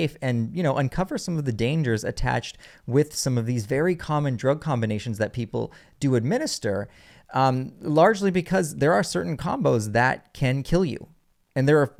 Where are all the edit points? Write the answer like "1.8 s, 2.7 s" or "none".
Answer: none